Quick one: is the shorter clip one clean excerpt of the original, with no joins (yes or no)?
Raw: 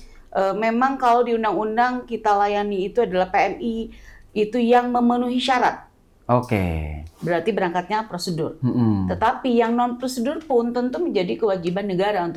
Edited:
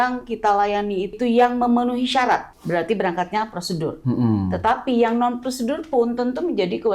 no